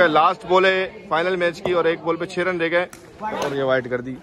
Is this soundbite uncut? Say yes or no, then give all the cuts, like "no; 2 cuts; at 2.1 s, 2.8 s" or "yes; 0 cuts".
yes; 0 cuts